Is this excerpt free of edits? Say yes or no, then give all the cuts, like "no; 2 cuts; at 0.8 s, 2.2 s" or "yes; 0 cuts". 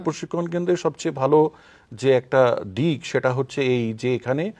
yes; 0 cuts